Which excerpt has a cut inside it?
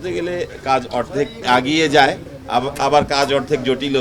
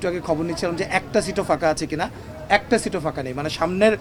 first; 2 cuts; at 1.4 s, 2.3 s

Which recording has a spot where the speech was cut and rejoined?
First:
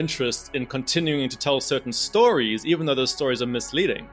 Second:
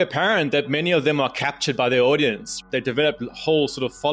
second; 1 cut; at 2.6 s

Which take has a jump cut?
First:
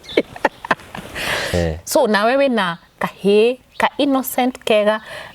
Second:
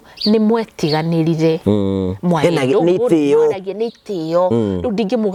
first; 1 cut; at 1.5 s

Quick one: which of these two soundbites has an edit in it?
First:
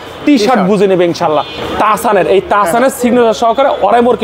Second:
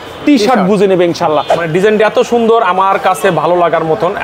second; 1 cut; at 1.6 s

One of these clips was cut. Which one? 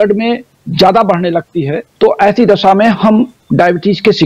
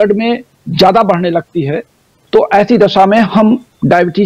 first; 1 cut; at 1.8 s

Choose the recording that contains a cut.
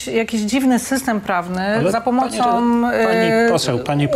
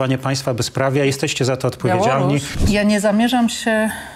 second; 1 cut; at 2.5 s

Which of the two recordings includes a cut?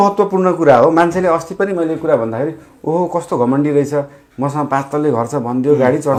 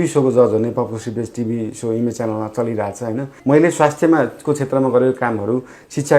second; 1 cut; at 3.3 s

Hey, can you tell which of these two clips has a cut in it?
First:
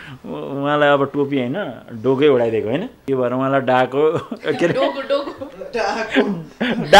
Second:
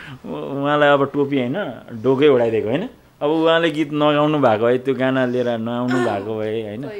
first; 1 cut; at 2.9 s

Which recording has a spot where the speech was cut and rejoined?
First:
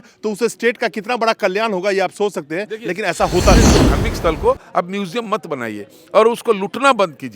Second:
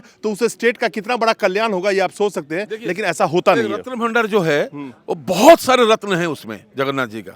first; 1 cut; at 3.8 s

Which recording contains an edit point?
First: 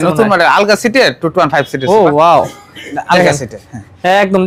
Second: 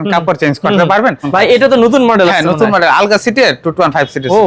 second; 1 cut; at 1.2 s

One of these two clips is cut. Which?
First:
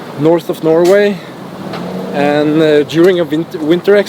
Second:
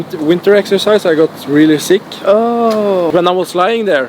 second; 1 cut; at 3.1 s

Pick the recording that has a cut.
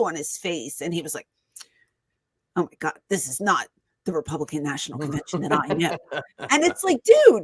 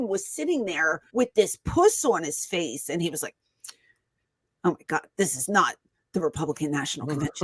second; 1 cut; at 1.0 s

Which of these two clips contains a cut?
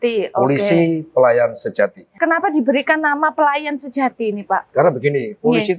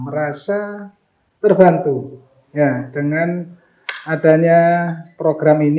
first; 1 cut; at 2.1 s

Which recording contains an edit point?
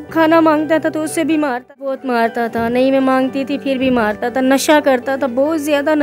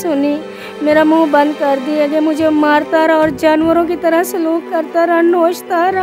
first; 1 cut; at 1.9 s

